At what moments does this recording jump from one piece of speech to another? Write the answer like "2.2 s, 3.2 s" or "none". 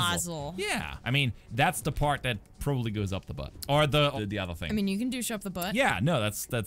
0.9 s, 3.5 s, 4.1 s